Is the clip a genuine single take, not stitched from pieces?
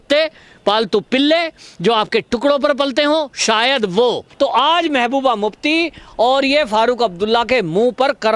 no; 1 cut; at 4.3 s

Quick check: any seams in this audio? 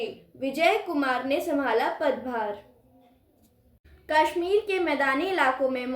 yes; 1 cut; at 3.8 s

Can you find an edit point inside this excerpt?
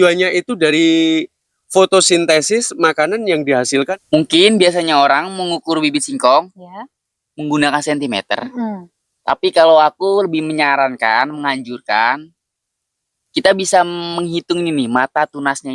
yes; 1 cut; at 3.7 s

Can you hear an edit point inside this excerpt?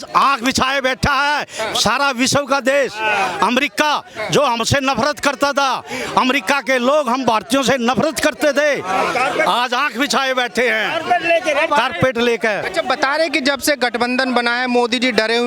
yes; 1 cut; at 12.6 s

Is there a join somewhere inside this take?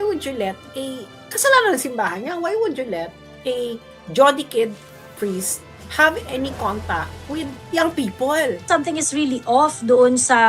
yes; 1 cut; at 8.7 s

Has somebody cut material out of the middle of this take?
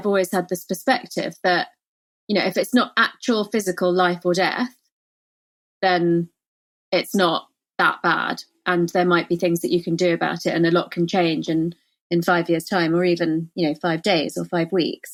no; 0 cuts

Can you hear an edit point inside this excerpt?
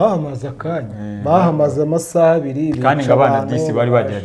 no; 0 cuts

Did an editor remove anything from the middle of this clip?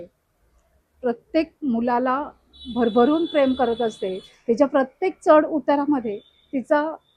no; 0 cuts

